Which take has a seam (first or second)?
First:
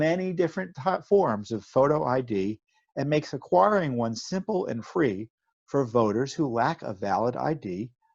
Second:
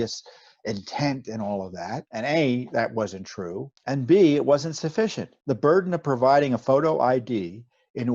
second